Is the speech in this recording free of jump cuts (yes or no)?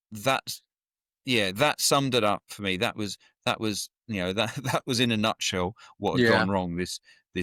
yes